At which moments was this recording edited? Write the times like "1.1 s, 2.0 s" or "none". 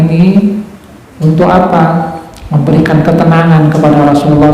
none

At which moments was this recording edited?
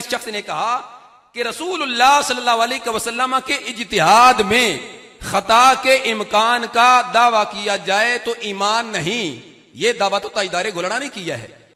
none

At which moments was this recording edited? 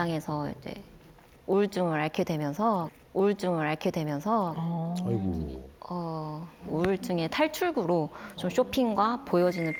none

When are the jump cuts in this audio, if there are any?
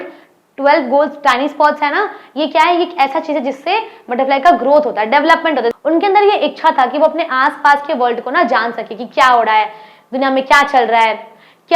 5.7 s

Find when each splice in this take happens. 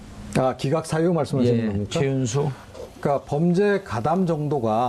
none

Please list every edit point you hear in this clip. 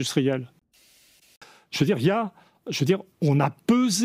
1.1 s

